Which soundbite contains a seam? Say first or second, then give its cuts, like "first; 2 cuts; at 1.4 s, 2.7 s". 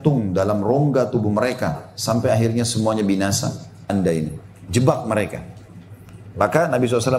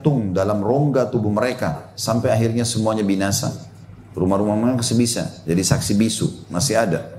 first; 1 cut; at 3.9 s